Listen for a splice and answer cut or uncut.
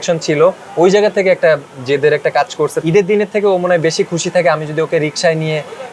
cut